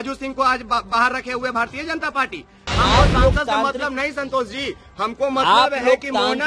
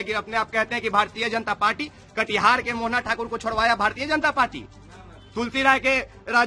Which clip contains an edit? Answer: first; 1 cut; at 2.6 s

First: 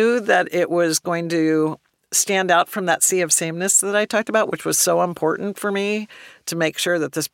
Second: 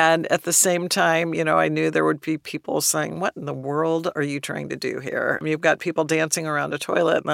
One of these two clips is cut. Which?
second; 1 cut; at 5.4 s

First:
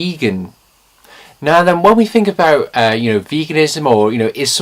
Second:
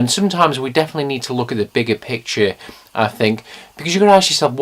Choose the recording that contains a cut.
second; 1 cut; at 2.1 s

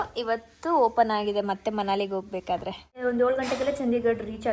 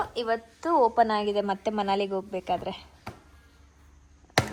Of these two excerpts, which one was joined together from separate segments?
first; 1 cut; at 3.0 s

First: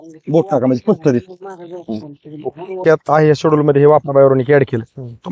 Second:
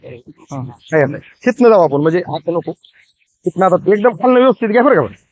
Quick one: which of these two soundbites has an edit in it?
first; 1 cut; at 2.8 s

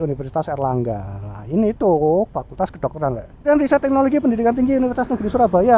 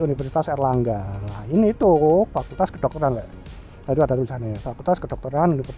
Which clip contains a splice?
first; 1 cut; at 3.5 s

